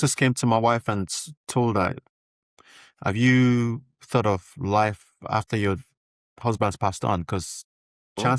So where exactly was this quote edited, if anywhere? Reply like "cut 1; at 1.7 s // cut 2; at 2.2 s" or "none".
none